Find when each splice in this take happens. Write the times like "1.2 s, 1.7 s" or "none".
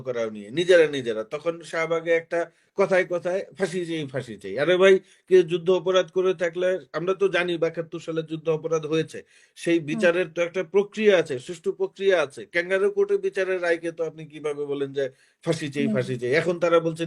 none